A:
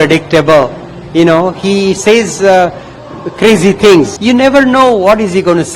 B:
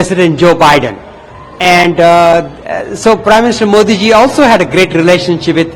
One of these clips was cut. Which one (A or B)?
A